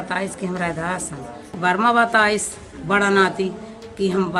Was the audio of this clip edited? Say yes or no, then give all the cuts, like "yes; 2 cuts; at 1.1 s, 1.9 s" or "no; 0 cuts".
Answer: yes; 1 cut; at 1.5 s